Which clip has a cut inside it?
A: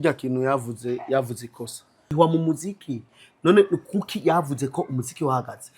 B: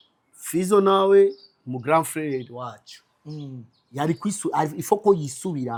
A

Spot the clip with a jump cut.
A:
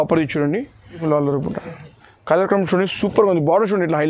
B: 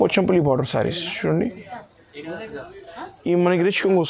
A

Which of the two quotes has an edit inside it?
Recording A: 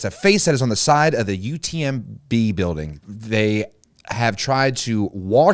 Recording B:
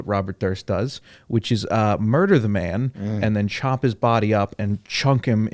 A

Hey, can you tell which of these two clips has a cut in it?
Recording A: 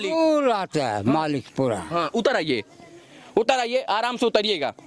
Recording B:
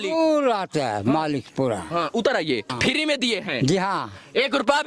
B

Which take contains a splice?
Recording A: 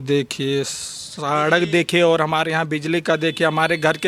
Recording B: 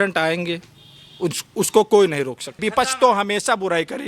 B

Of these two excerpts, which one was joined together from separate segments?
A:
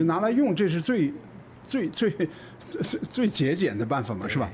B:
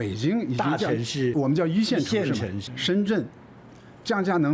B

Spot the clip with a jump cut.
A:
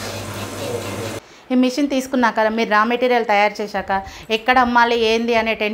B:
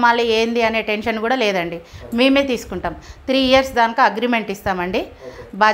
A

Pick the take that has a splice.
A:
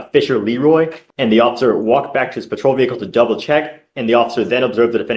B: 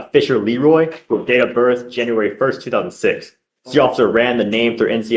A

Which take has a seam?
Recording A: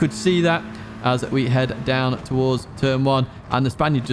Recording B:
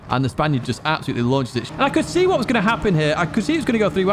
B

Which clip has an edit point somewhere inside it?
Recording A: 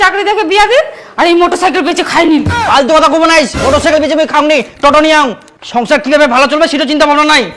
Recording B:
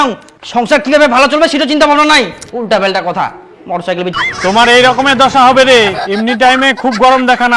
B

